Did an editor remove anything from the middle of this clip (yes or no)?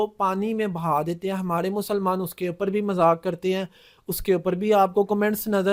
no